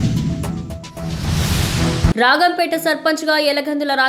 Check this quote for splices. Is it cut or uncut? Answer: uncut